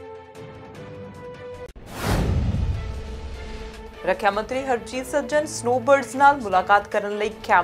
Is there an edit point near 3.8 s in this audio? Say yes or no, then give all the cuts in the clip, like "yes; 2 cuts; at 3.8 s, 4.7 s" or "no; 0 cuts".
yes; 1 cut; at 3.8 s